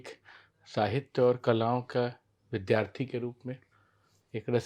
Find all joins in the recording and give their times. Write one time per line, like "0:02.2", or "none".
none